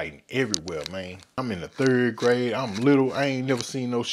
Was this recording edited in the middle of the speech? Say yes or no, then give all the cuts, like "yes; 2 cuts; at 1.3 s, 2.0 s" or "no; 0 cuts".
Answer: yes; 1 cut; at 1.4 s